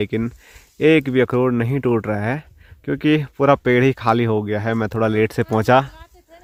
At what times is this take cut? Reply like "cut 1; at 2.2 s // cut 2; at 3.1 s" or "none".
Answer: none